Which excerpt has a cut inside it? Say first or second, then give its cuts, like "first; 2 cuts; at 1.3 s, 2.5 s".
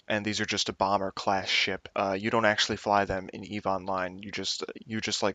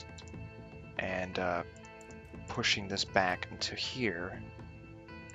first; 1 cut; at 4.3 s